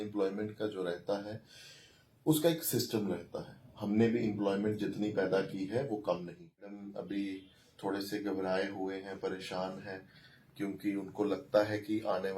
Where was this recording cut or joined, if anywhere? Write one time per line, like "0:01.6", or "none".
0:06.9